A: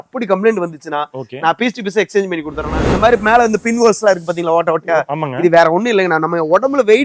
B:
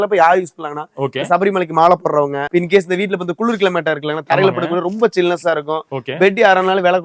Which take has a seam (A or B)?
A